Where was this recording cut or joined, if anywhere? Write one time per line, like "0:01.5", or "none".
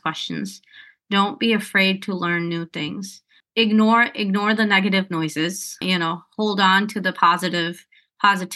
none

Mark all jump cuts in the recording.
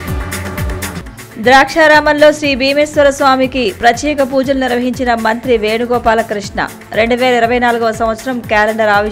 0:01.0

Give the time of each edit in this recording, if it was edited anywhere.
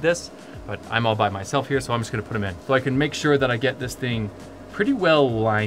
0:02.5

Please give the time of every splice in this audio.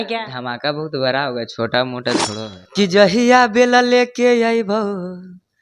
0:02.4

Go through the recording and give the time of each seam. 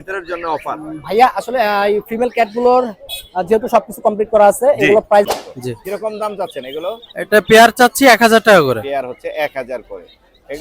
0:05.3

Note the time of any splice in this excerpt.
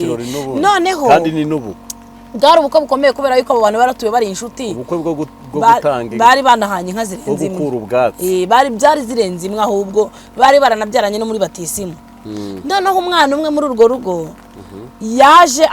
none

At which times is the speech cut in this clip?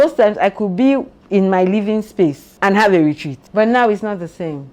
none

